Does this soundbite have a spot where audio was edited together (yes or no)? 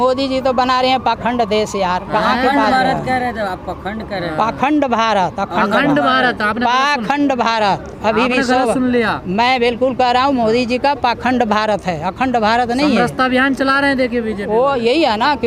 no